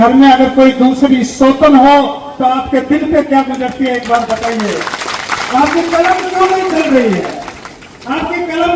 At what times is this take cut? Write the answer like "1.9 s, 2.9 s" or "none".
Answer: none